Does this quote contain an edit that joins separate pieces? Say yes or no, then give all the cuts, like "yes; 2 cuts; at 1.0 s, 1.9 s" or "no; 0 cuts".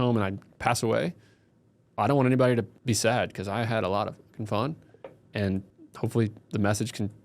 yes; 2 cuts; at 2.8 s, 5.8 s